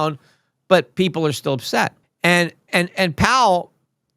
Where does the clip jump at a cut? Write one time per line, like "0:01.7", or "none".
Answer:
0:02.0